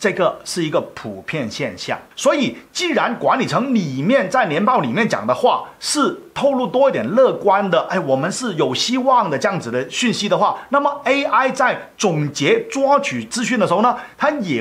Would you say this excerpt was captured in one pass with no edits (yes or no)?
yes